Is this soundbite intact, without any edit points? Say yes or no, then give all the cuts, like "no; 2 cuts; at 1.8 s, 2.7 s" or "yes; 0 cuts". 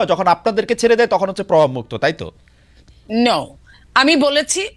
yes; 0 cuts